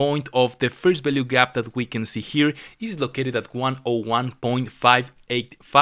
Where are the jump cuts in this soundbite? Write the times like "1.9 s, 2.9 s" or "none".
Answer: none